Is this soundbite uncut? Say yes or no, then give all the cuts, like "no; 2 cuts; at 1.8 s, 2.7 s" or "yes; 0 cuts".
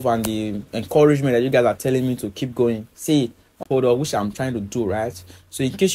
no; 1 cut; at 3.6 s